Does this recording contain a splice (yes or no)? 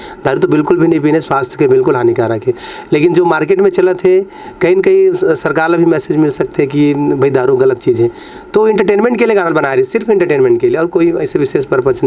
no